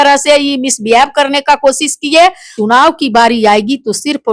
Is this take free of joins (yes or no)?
no